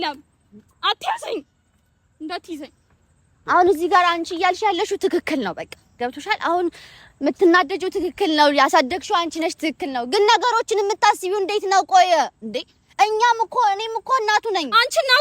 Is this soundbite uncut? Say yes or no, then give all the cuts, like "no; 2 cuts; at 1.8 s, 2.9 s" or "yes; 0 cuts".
no; 1 cut; at 3.3 s